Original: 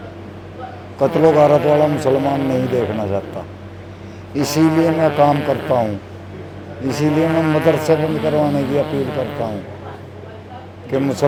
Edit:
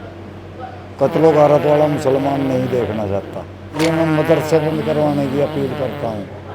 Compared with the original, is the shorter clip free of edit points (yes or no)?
no